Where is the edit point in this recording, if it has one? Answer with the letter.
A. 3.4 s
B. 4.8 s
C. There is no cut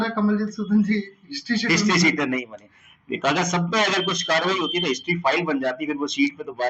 C